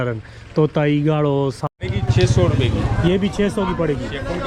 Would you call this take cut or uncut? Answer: cut